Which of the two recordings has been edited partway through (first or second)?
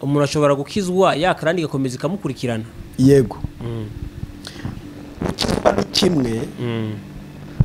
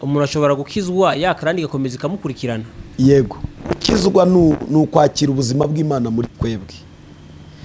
second